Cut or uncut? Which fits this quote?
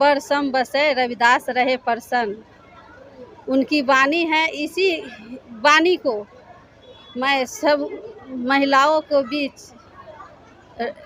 uncut